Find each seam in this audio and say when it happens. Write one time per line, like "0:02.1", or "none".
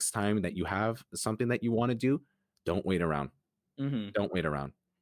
none